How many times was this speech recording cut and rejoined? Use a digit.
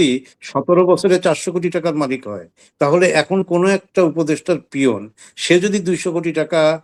0